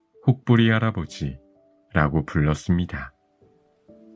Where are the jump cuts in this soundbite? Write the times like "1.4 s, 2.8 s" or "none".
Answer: 3.1 s

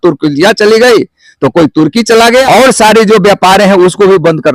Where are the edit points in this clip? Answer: 2.3 s

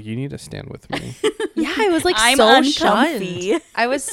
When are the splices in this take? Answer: none

